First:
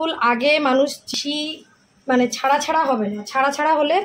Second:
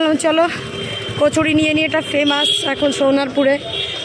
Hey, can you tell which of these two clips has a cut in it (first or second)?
first